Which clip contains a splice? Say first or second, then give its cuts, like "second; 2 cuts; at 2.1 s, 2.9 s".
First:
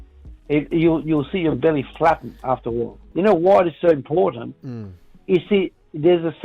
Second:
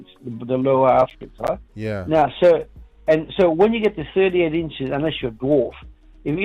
first; 1 cut; at 3.0 s